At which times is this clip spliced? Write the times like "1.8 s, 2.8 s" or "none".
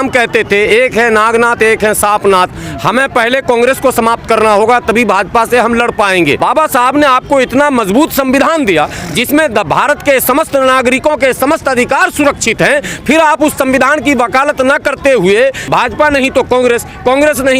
6.4 s, 15.6 s

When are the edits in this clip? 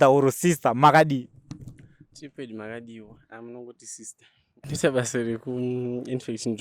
4.5 s

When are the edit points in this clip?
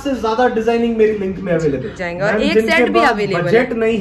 1.9 s

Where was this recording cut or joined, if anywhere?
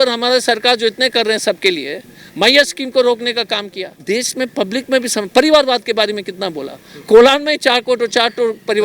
3.9 s

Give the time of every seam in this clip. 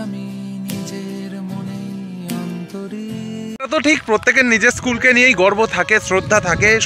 3.6 s

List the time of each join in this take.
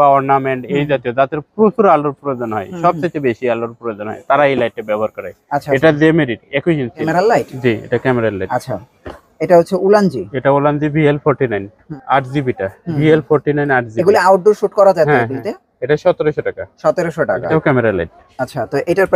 7.1 s, 11.9 s, 17.5 s

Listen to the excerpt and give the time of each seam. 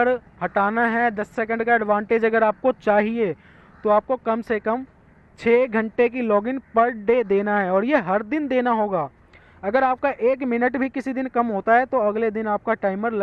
none

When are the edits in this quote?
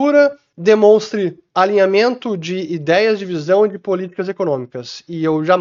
none

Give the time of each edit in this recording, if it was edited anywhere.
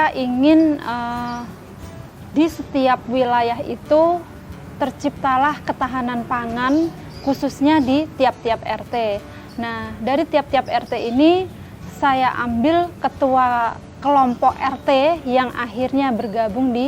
none

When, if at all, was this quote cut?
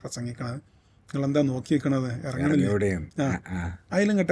none

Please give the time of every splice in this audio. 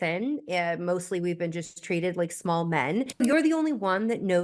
3.2 s

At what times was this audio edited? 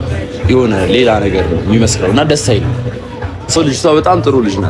3.6 s

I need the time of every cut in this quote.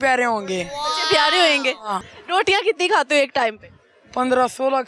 2.1 s

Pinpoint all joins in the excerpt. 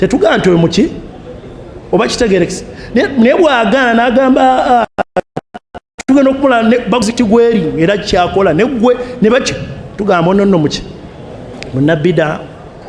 none

